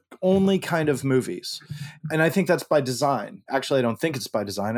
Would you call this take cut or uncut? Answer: cut